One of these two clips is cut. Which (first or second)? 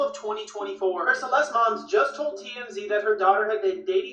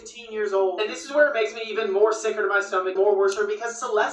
second